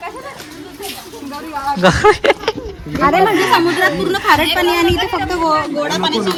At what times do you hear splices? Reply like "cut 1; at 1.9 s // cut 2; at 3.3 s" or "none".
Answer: none